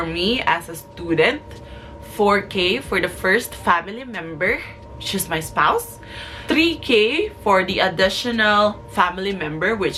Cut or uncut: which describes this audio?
uncut